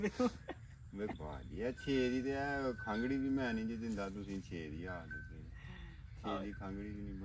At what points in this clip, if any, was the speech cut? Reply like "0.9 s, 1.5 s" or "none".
1.1 s